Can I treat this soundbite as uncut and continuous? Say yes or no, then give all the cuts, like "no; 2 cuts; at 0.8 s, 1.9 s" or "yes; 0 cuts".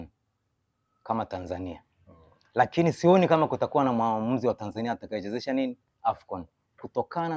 yes; 0 cuts